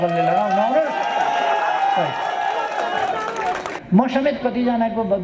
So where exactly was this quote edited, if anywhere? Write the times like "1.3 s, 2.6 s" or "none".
3.7 s